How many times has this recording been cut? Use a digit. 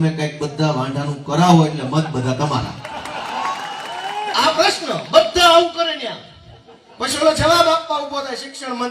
1